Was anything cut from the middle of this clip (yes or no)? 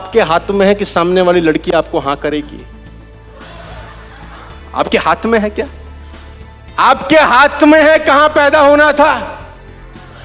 no